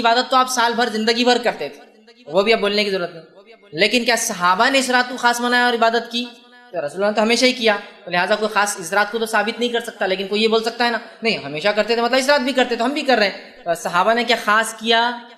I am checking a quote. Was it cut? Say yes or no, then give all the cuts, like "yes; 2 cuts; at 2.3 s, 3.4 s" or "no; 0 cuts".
no; 0 cuts